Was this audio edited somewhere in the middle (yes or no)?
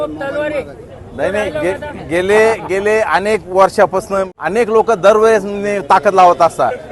yes